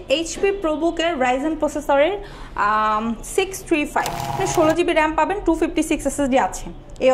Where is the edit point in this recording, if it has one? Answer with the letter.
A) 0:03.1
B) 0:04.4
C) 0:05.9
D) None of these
B